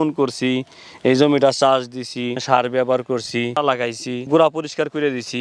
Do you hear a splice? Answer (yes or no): yes